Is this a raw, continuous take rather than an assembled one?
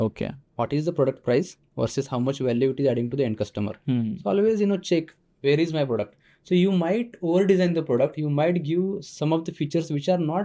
yes; 0 cuts

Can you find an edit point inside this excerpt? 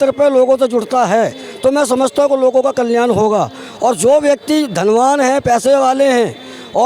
no; 0 cuts

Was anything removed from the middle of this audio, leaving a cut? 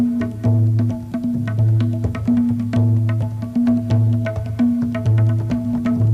yes; 1 cut; at 2.7 s

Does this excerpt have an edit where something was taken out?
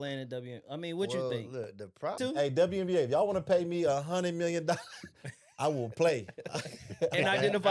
yes; 1 cut; at 2.2 s

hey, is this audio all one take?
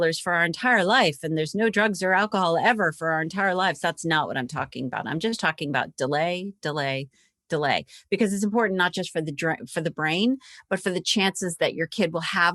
yes; 0 cuts

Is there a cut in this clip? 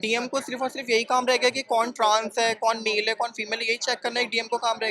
no; 0 cuts

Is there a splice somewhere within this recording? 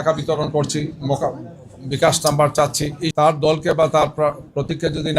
yes; 1 cut; at 3.0 s

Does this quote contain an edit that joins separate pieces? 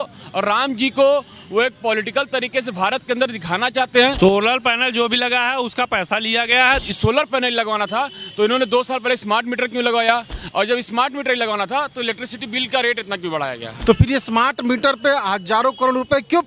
yes; 3 cuts; at 4.1 s, 6.8 s, 13.7 s

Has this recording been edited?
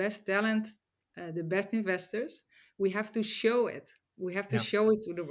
no; 0 cuts

